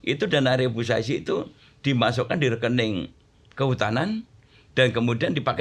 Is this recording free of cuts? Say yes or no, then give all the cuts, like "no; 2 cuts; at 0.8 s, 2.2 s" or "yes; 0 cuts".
yes; 0 cuts